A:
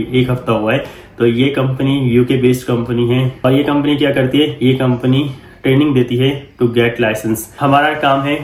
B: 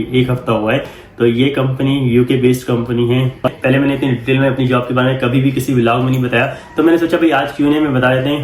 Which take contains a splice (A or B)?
B